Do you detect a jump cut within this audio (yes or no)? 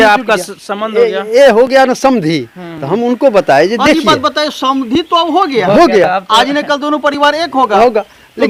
no